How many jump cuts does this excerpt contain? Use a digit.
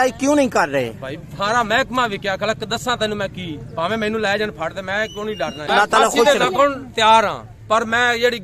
1